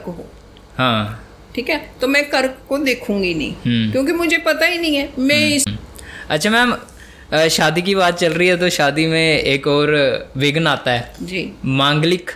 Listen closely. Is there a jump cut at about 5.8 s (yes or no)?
yes